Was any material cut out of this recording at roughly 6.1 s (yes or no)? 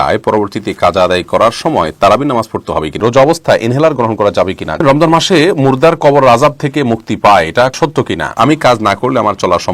no